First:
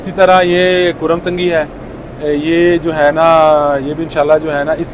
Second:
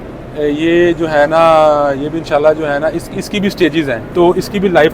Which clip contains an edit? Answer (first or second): second